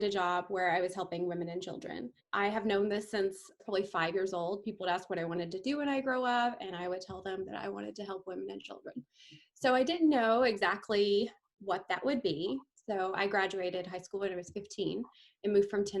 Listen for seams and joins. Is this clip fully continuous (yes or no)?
no